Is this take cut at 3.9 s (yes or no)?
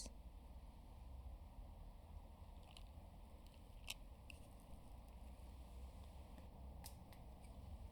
no